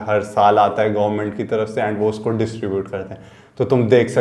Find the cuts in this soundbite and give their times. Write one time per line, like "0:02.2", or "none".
none